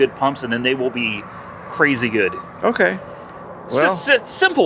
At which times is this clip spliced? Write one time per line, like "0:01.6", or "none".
none